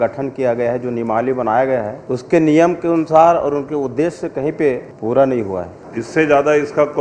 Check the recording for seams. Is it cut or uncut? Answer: cut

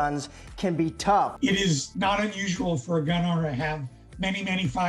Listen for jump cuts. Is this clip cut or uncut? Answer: uncut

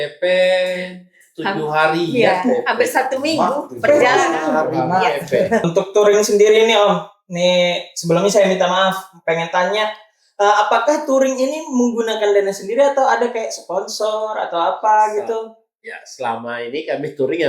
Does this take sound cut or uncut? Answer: cut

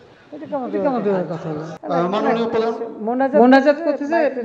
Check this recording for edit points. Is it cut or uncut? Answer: cut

